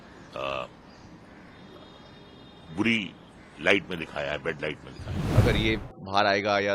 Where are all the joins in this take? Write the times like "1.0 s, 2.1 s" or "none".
5.2 s